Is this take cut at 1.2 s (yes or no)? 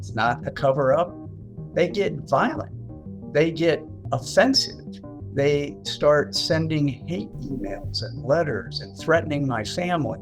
yes